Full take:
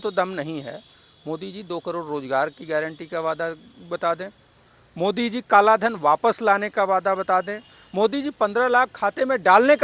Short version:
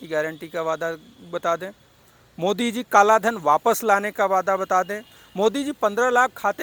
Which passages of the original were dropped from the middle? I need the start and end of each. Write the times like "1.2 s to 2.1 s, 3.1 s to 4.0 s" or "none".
none